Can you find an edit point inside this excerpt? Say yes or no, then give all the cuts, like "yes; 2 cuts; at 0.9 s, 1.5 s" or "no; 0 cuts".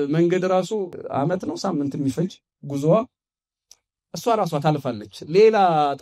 yes; 1 cut; at 1.0 s